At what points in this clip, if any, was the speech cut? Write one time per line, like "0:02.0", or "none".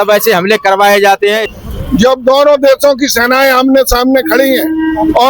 0:01.4